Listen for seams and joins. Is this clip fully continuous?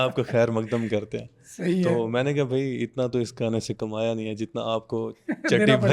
yes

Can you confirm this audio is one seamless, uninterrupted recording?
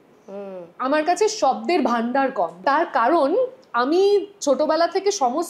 no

